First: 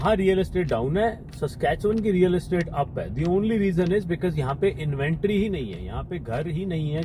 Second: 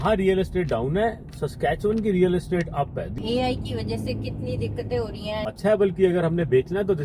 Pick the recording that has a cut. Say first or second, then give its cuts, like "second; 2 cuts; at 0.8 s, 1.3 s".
second; 2 cuts; at 3.1 s, 5.5 s